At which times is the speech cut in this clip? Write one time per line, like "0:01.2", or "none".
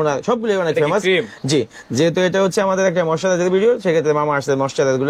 none